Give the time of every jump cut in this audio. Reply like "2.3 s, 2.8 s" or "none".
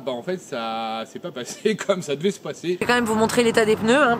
2.8 s